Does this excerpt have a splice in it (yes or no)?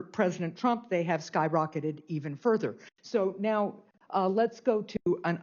no